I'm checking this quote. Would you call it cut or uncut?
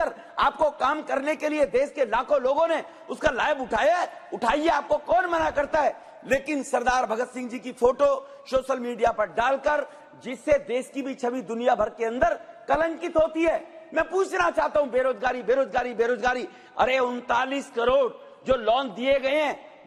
uncut